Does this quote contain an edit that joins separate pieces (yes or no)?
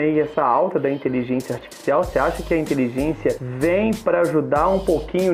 yes